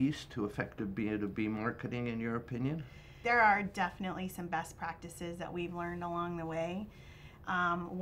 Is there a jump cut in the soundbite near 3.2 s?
yes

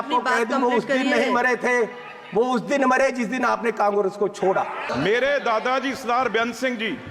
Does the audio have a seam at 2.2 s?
no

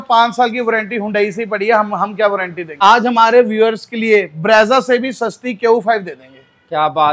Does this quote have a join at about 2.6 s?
yes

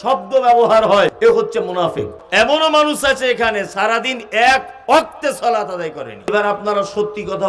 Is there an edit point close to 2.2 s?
yes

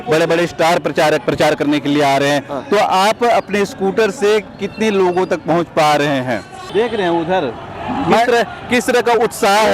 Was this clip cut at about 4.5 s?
no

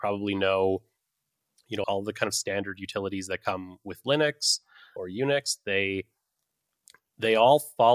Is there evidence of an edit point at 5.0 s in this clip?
yes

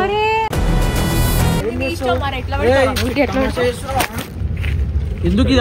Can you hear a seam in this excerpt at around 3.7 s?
no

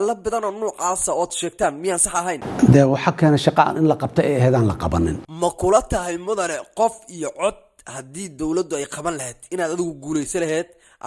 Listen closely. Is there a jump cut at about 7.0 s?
no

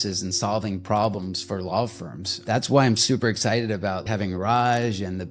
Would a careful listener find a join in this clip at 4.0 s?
yes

